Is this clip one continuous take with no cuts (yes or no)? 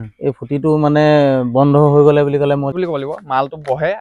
no